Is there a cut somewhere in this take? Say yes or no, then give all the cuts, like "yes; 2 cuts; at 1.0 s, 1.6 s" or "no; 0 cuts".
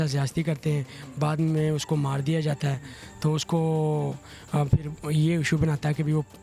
no; 0 cuts